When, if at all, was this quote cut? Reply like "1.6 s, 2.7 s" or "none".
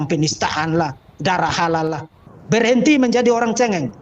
2.0 s